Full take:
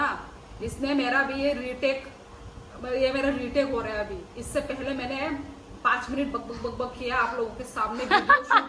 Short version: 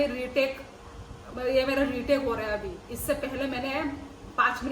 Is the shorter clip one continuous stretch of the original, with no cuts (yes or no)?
yes